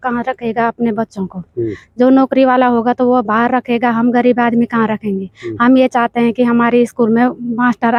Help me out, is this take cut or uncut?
uncut